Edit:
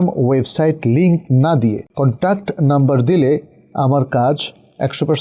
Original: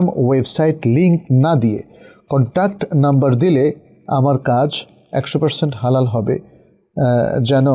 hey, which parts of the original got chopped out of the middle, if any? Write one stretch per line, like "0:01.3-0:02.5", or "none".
0:01.9-0:02.2